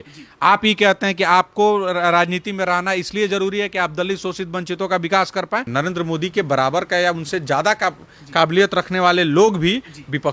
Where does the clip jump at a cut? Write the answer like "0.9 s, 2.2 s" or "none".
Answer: 5.7 s